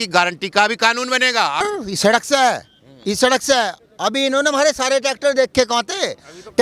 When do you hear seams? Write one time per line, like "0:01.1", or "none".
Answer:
0:01.6